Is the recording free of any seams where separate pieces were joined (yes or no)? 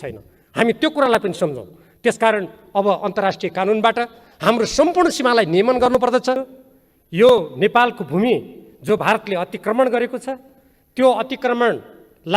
no